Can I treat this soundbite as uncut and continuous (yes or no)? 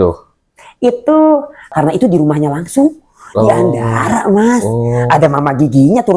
no